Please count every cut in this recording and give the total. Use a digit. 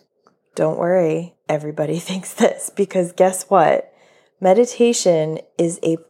1